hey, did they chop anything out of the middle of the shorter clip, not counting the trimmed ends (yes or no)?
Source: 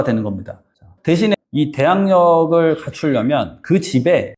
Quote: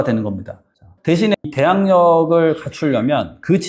yes